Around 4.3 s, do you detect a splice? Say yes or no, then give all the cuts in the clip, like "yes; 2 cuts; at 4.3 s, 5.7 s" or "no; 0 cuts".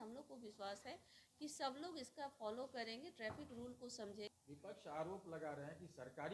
yes; 1 cut; at 4.3 s